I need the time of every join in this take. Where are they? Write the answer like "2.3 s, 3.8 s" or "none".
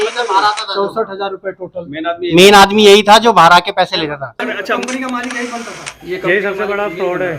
4.4 s